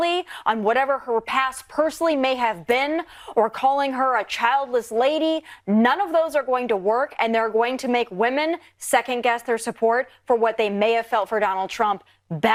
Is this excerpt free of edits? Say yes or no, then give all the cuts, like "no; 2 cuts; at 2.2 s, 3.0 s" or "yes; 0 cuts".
yes; 0 cuts